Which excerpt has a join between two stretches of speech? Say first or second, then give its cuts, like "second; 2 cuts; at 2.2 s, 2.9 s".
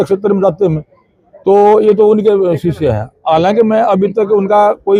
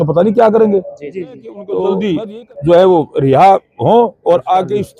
second; 1 cut; at 1.7 s